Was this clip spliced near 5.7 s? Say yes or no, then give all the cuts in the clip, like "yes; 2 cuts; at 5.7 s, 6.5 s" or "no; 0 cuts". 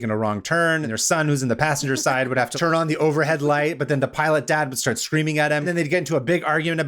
yes; 3 cuts; at 0.8 s, 2.5 s, 5.7 s